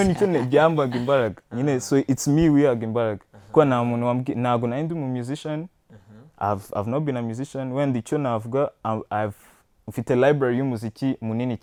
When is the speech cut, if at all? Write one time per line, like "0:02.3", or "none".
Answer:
none